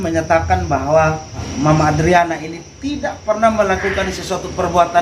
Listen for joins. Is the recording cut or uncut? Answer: cut